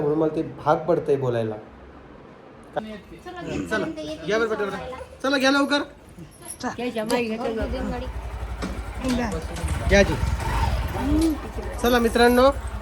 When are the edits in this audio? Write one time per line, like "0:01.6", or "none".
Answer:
0:02.8